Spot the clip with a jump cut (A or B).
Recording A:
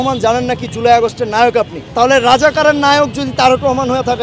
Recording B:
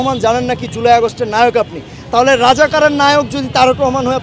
A